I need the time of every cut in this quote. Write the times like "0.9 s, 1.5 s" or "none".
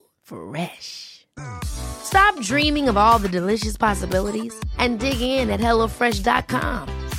none